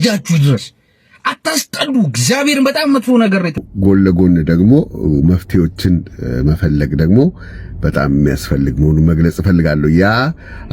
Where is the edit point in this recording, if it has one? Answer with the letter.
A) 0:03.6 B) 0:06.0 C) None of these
A